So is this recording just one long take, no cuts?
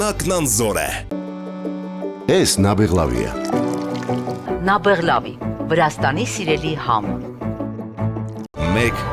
no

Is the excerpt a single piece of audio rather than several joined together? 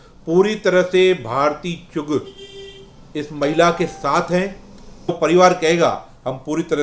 no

